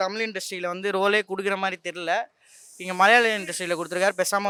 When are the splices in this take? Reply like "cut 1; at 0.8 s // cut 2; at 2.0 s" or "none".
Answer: none